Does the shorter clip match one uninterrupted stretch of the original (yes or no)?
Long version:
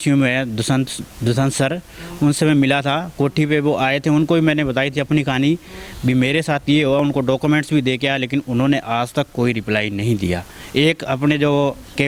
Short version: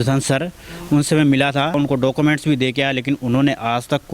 no